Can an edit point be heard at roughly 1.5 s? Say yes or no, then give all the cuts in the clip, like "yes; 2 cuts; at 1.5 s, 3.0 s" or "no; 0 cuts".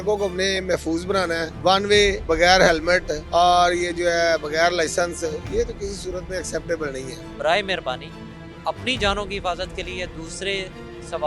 yes; 4 cuts; at 1.5 s, 2.2 s, 3.2 s, 7.2 s